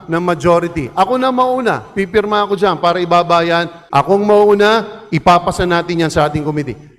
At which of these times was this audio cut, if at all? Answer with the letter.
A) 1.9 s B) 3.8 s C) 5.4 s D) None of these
B